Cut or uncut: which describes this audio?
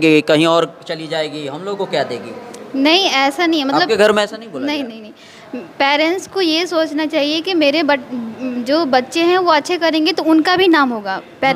uncut